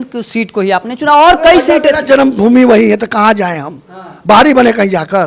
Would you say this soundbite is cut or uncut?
uncut